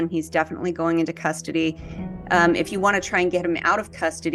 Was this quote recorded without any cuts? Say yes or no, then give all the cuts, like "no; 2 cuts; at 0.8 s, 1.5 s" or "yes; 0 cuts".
yes; 0 cuts